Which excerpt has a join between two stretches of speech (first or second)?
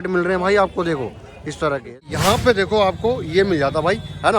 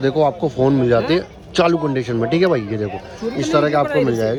first